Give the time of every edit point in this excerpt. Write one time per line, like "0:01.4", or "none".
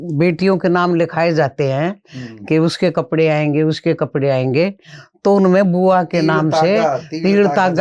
none